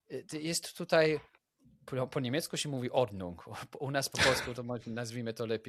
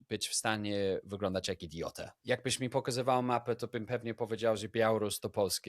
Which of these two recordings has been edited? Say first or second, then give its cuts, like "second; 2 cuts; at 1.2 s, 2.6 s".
second; 1 cut; at 2.1 s